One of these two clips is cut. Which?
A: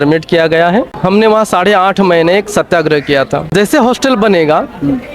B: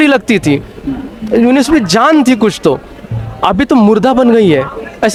A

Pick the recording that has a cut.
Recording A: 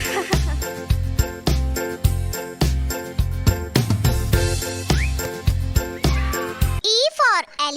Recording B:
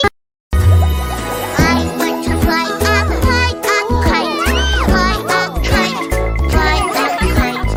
A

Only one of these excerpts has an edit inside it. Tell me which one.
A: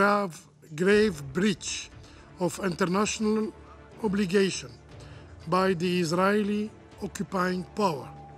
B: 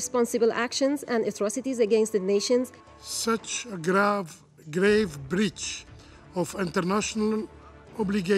B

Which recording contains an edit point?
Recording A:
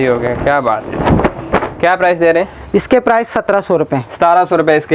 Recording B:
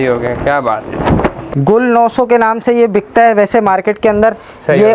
B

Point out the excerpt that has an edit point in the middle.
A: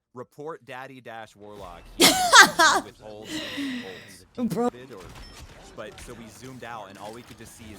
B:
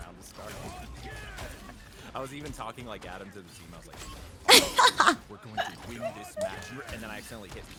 A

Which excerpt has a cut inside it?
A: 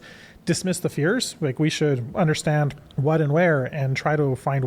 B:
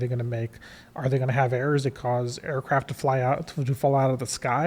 A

